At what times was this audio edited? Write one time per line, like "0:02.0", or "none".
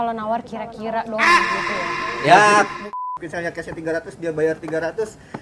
0:02.9